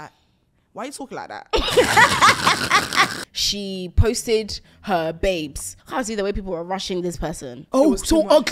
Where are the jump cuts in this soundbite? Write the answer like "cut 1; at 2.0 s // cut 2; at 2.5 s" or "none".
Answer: cut 1; at 3.2 s // cut 2; at 5.8 s // cut 3; at 7.5 s